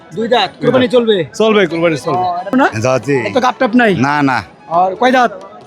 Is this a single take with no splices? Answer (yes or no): no